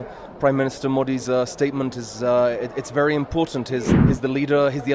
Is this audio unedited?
no; 1 cut; at 3.9 s

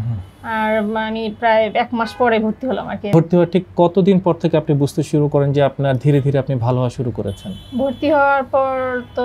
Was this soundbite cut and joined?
yes; 1 cut; at 3.1 s

